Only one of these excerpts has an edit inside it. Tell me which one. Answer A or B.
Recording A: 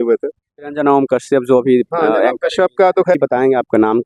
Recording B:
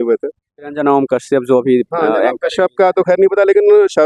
A